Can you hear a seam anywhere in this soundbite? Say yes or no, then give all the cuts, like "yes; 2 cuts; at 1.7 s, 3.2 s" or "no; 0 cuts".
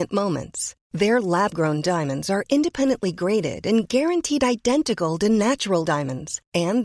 no; 0 cuts